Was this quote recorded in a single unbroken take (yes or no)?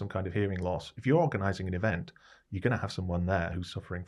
yes